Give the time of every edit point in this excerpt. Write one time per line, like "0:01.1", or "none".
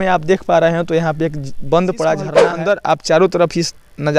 0:02.5